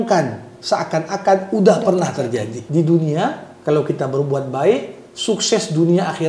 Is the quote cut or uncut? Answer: cut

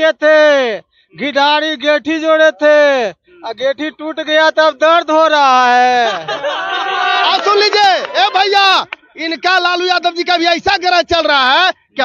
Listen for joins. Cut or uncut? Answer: uncut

